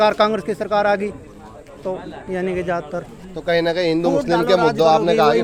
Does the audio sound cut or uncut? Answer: uncut